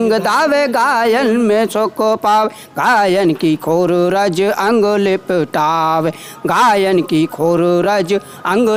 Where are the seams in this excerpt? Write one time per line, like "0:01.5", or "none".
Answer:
none

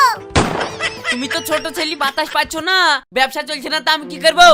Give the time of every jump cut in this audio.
none

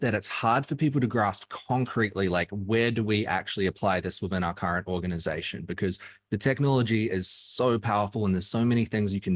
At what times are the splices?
none

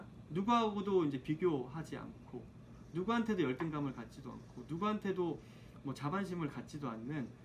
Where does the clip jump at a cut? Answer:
none

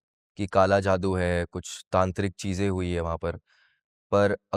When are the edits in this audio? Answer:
none

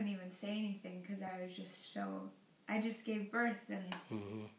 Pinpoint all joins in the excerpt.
none

